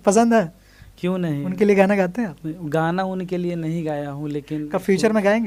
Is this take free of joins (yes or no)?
yes